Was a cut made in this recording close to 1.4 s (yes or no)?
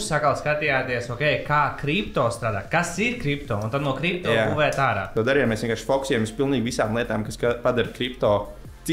no